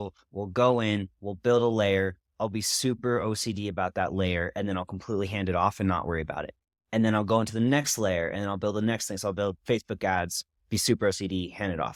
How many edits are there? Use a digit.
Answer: 0